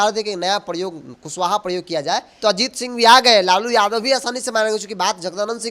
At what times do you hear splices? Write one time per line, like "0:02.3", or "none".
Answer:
0:02.3